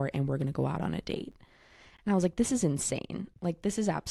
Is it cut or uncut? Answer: uncut